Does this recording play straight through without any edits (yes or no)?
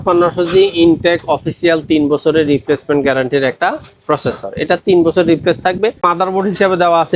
no